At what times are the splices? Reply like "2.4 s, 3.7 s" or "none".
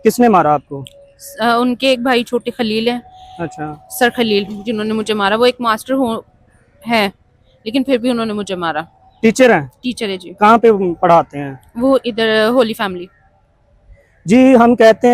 none

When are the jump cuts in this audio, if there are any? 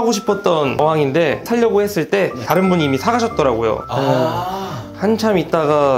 none

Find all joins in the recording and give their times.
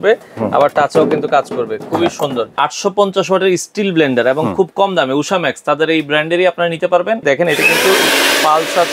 2.5 s, 7.2 s

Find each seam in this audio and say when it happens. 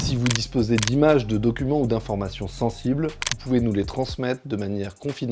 none

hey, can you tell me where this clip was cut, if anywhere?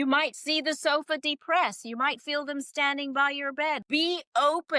3.8 s

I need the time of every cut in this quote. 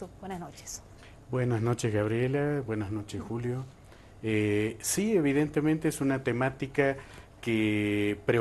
3.0 s

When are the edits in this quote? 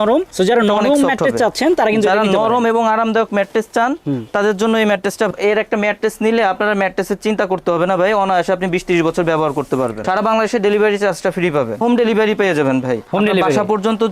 5.3 s, 10.0 s, 11.8 s

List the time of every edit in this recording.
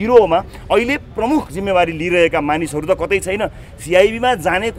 none

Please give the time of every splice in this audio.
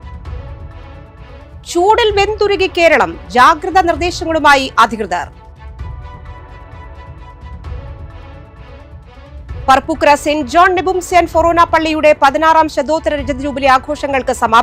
1.3 s

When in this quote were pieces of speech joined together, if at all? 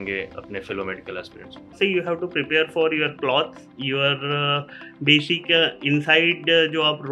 1.7 s

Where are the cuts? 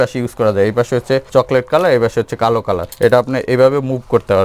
1.3 s, 2.9 s

